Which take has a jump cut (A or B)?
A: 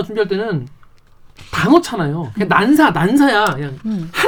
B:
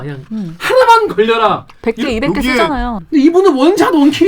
B